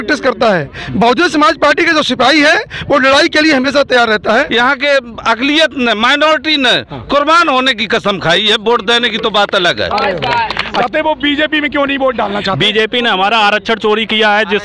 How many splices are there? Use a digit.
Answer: 2